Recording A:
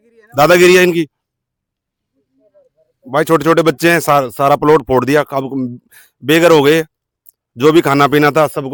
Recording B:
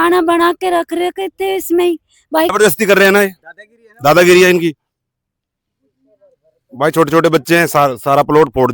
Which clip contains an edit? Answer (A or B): B